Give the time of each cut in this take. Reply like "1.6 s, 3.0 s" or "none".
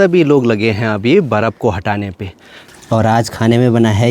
2.7 s